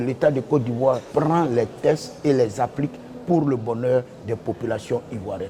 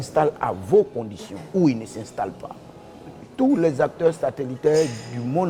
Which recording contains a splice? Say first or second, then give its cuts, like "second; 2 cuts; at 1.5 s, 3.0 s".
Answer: first; 1 cut; at 1.0 s